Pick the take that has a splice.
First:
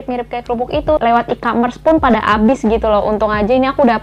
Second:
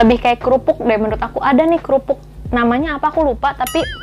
first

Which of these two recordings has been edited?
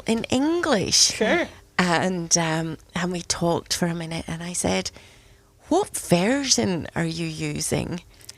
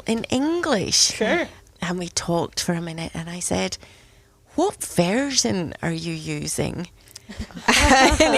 second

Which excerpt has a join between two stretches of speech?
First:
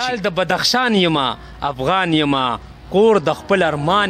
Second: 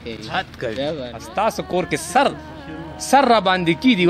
second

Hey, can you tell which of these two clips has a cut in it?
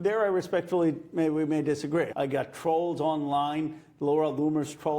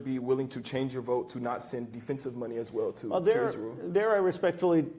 first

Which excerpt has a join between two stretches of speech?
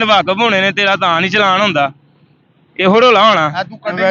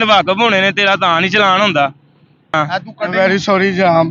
second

